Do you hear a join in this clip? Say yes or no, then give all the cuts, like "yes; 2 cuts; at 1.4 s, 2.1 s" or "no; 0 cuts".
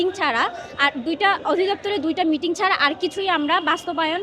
no; 0 cuts